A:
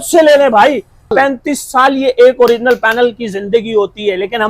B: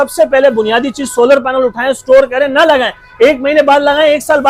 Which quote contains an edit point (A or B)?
A